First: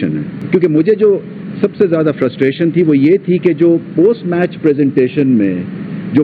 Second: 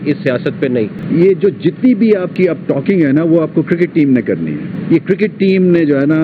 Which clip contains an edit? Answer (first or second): second